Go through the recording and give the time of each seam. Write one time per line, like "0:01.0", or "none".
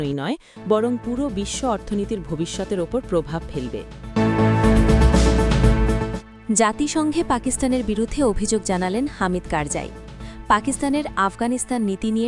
0:04.0
0:06.3